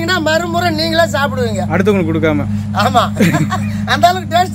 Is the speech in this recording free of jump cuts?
yes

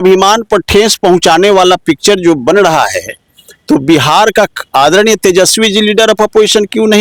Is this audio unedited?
yes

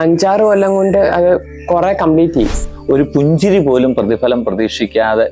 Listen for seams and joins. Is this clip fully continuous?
no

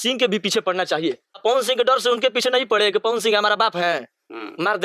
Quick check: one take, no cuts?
no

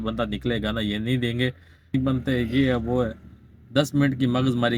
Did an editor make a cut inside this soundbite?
yes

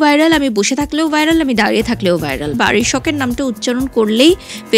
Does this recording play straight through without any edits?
no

